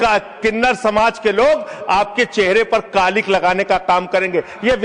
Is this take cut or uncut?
uncut